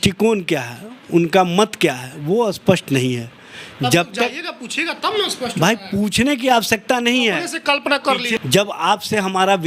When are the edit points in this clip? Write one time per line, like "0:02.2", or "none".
0:08.3